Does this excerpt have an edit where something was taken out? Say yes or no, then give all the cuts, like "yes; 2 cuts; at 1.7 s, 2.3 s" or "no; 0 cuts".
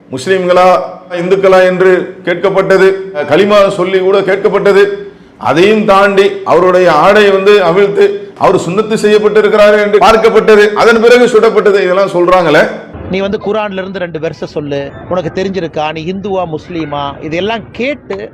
no; 0 cuts